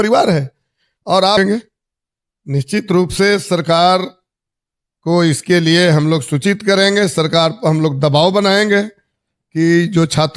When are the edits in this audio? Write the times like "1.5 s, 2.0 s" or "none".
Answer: 1.4 s